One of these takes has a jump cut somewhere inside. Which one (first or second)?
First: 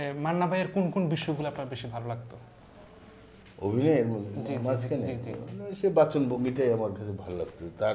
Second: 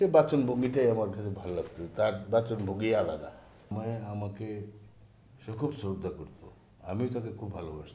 second